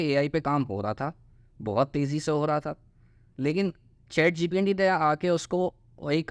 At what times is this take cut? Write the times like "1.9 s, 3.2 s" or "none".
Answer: none

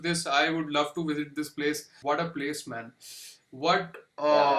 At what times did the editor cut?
2.0 s

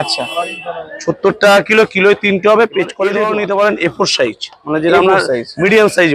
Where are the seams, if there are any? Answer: 3.2 s

